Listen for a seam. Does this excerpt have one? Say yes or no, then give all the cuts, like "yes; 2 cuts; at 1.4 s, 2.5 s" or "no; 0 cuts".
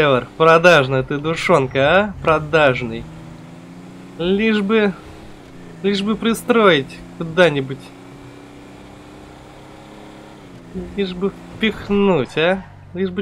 no; 0 cuts